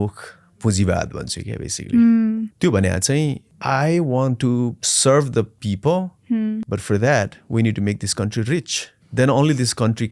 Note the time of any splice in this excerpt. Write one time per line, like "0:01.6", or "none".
0:02.5
0:03.5
0:04.9
0:09.0

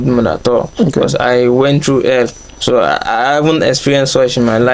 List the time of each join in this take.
none

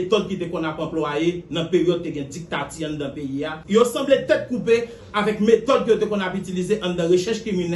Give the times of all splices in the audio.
0:03.5

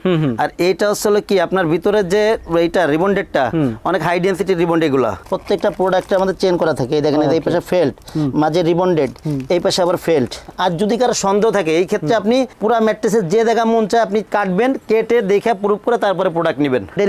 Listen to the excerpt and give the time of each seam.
0:05.3
0:10.4

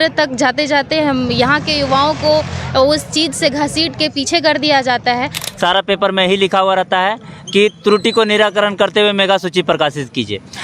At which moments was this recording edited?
0:05.4

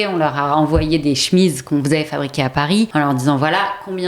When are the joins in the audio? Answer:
0:02.9

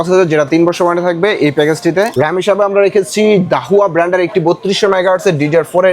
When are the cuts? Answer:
0:02.1

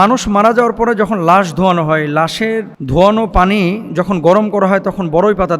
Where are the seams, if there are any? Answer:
0:02.8

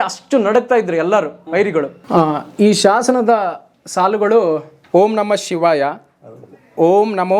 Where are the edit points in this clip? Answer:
0:02.0
0:04.7

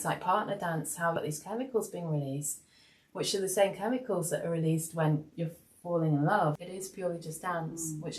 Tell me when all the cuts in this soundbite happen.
0:01.2
0:06.6

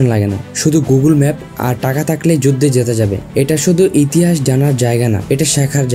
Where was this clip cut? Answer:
none

